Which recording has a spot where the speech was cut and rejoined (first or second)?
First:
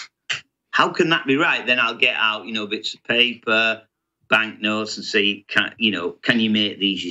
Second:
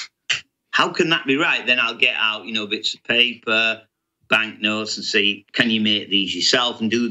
second